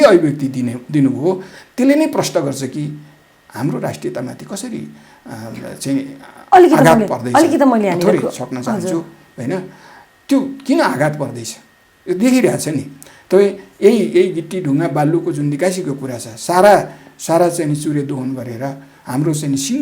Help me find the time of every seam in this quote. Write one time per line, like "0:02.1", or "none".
none